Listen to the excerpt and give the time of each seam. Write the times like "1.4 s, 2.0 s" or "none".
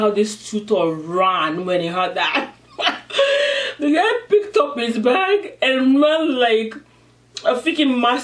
none